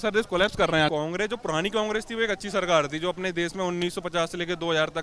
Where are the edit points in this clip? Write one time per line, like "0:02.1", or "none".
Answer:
0:00.9